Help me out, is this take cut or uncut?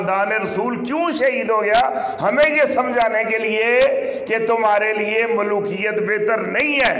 uncut